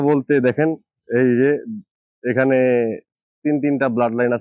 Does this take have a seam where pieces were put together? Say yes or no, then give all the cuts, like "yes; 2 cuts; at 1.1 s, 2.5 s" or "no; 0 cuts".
no; 0 cuts